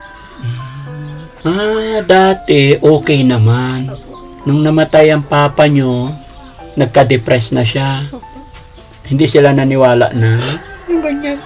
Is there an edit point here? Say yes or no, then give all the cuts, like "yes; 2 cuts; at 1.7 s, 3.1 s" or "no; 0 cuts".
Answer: yes; 2 cuts; at 1.2 s, 8.9 s